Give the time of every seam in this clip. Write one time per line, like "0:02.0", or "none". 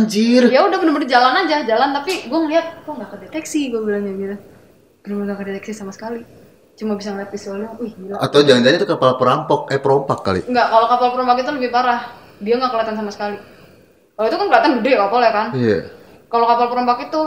none